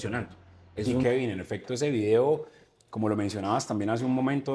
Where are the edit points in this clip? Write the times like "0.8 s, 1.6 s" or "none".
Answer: 1.0 s

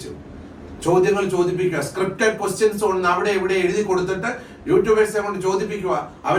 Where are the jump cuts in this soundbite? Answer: none

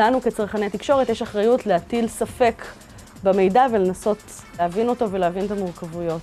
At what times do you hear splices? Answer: 4.6 s

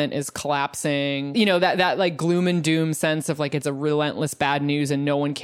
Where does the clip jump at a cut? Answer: 1.3 s

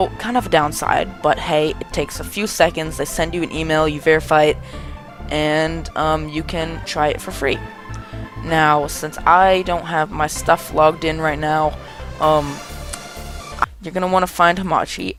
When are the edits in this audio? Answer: none

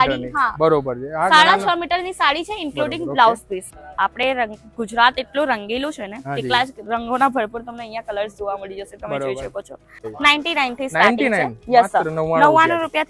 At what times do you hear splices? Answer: 3.7 s, 10.1 s

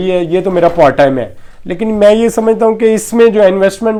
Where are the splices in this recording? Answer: none

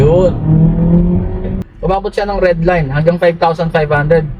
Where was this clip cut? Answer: 1.5 s

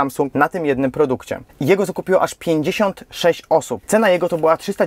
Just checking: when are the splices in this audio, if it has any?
1.4 s, 3.8 s

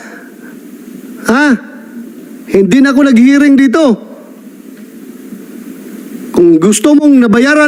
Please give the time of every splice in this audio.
none

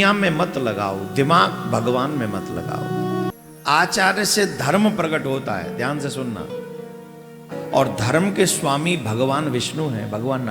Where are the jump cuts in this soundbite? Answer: 3.3 s

